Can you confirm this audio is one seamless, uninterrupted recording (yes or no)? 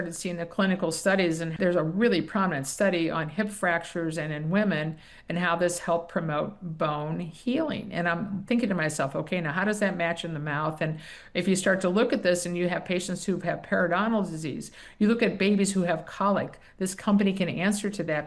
no